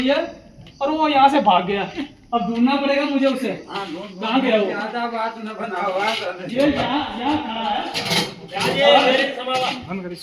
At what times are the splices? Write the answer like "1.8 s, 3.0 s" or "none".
none